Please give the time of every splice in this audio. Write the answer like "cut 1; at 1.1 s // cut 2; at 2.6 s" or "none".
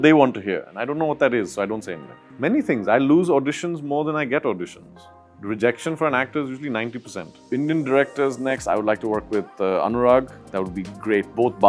cut 1; at 2.2 s // cut 2; at 7.4 s